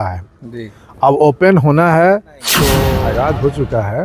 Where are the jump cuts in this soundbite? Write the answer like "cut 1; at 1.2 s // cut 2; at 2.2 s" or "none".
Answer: cut 1; at 2.8 s